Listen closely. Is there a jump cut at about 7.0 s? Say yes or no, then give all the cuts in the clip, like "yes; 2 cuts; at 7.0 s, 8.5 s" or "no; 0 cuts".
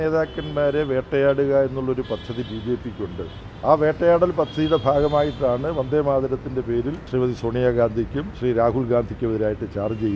yes; 3 cuts; at 3.4 s, 7.0 s, 8.2 s